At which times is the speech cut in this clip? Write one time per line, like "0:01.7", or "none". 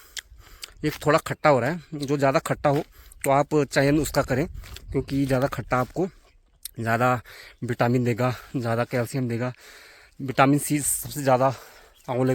none